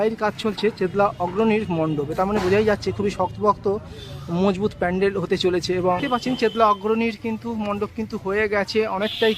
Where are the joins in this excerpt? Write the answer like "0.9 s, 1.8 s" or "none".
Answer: 6.0 s